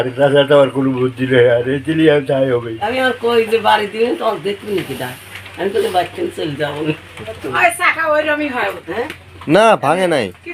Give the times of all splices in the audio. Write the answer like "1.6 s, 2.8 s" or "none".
2.8 s, 7.4 s